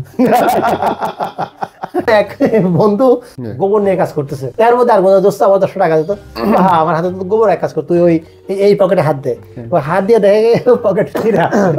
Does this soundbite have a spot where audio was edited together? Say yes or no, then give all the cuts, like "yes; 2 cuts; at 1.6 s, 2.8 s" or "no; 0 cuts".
yes; 3 cuts; at 2.1 s, 3.4 s, 4.5 s